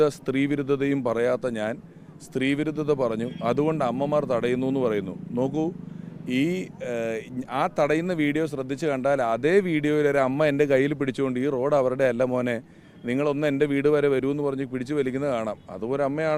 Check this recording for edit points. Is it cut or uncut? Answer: uncut